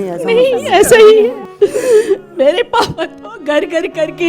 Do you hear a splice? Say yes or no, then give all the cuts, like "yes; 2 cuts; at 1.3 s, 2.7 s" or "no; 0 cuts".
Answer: yes; 1 cut; at 1.4 s